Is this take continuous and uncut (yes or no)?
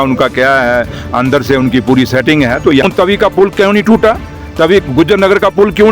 no